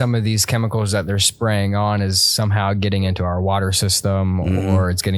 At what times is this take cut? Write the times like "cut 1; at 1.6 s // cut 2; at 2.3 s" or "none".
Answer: none